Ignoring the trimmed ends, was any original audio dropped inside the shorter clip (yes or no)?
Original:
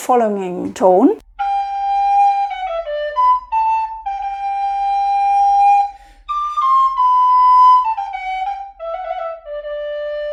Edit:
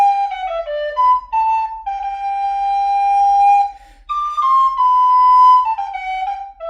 no